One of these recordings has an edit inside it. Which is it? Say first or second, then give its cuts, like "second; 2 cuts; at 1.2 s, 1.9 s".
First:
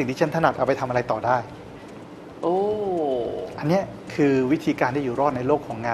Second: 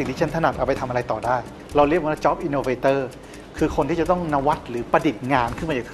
second; 1 cut; at 1.6 s